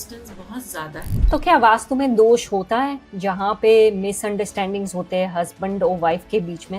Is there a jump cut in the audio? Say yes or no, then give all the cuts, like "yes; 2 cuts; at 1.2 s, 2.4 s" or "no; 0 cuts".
yes; 1 cut; at 1.1 s